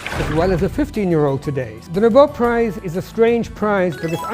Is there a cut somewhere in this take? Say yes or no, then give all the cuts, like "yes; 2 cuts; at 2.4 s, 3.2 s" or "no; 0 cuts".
yes; 2 cuts; at 1.7 s, 2.8 s